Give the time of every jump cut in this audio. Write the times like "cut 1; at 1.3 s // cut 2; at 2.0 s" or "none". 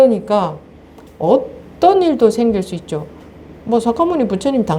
none